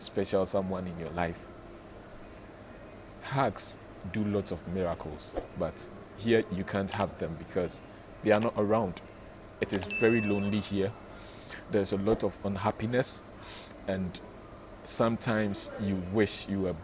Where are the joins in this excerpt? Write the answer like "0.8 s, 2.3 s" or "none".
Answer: 9.4 s